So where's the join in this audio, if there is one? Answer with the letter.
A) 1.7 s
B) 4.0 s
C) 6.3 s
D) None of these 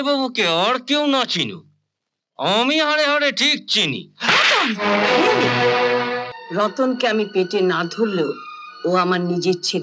C